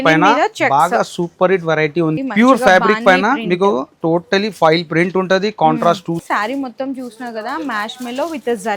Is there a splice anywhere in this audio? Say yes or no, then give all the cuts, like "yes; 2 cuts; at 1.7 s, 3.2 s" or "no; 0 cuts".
yes; 2 cuts; at 2.2 s, 6.2 s